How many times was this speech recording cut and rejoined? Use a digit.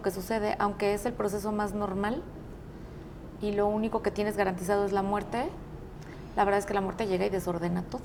0